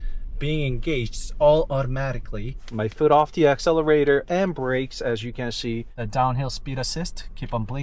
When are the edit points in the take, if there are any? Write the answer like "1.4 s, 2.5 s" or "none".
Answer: 2.5 s, 6.0 s